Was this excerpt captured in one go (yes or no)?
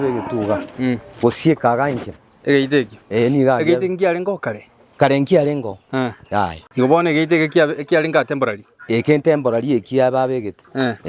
no